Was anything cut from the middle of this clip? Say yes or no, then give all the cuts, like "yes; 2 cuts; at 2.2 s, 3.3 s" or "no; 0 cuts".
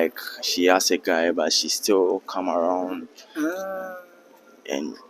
no; 0 cuts